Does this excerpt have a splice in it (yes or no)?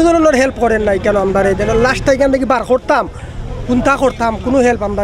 no